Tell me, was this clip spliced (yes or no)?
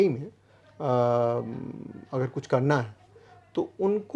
no